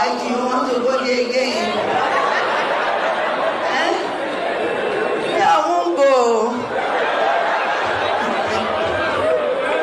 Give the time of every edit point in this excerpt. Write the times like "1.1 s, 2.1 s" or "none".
none